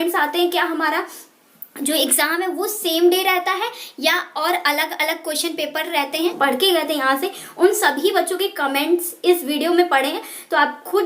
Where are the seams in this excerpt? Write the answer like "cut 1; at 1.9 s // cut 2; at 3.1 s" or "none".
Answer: cut 1; at 6.0 s